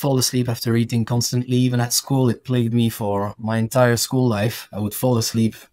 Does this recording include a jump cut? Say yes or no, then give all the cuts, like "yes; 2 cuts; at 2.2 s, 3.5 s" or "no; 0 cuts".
no; 0 cuts